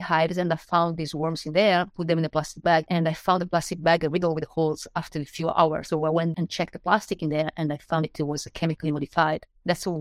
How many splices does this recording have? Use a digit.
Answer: 2